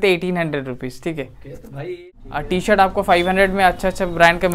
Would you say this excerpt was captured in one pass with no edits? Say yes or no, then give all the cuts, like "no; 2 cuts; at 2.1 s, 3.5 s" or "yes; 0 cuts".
no; 1 cut; at 2.0 s